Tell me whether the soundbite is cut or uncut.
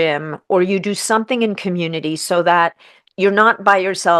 uncut